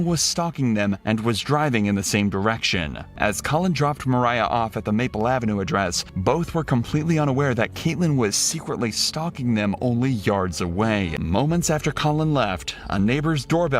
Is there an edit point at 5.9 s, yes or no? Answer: no